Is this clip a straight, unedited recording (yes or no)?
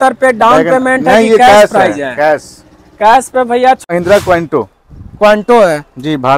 no